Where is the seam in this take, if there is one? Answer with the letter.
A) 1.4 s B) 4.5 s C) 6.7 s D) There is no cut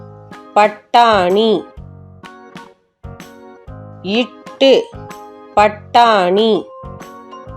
C